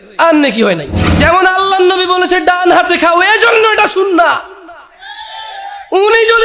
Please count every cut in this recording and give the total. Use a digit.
1